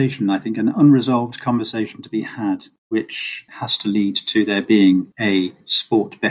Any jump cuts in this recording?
yes; 2 cuts; at 3.3 s, 5.1 s

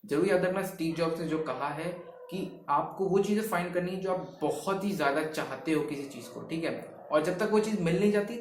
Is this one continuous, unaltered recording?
yes; 0 cuts

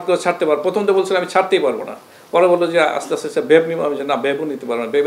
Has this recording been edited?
no; 0 cuts

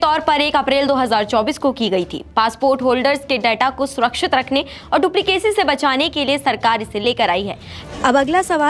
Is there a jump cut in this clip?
yes; 1 cut; at 7.7 s

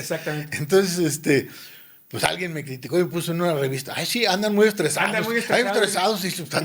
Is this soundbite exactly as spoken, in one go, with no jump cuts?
yes; 0 cuts

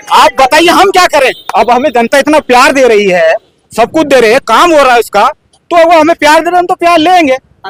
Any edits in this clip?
no; 0 cuts

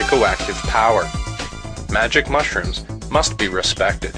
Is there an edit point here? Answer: no; 0 cuts

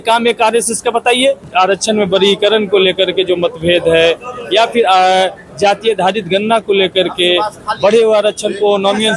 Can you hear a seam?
yes; 1 cut; at 1.4 s

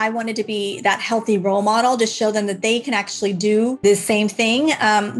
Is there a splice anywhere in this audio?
yes; 1 cut; at 3.8 s

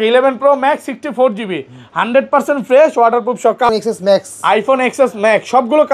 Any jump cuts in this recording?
yes; 1 cut; at 3.7 s

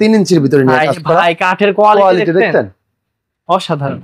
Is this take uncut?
yes; 0 cuts

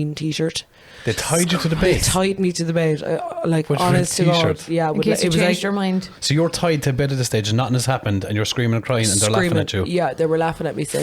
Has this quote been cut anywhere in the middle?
yes; 1 cut; at 6.1 s

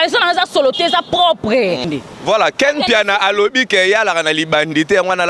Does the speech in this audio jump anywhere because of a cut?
yes; 1 cut; at 1.9 s

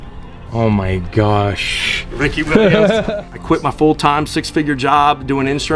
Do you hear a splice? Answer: yes; 1 cut; at 3.1 s

